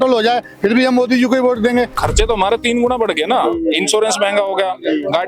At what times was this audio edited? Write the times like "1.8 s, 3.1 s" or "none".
1.9 s